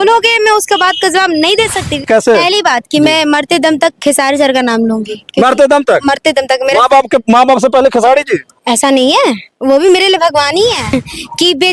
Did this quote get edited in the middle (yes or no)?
yes